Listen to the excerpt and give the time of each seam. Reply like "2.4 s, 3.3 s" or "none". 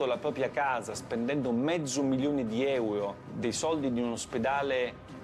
3.2 s